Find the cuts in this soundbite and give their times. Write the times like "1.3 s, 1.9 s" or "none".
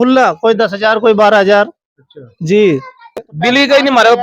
3.3 s